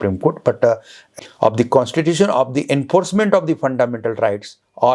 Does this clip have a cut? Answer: yes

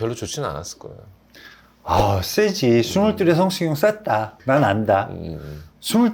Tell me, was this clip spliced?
yes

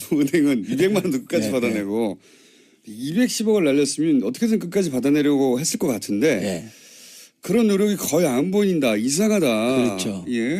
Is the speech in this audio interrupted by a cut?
yes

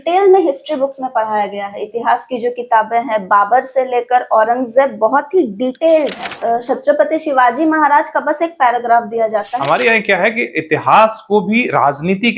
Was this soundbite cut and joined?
yes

